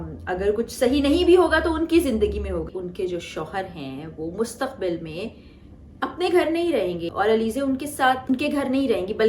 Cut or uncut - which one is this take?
cut